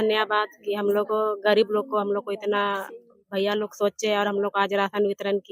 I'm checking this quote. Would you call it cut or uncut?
uncut